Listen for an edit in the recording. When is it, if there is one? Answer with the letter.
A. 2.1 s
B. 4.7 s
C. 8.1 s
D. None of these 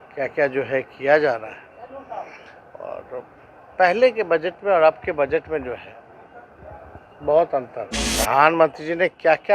C